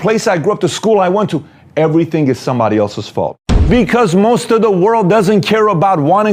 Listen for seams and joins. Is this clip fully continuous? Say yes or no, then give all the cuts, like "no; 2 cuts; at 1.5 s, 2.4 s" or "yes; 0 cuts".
no; 1 cut; at 3.6 s